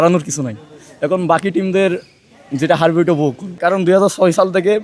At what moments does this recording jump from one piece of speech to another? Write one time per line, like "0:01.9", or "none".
0:03.6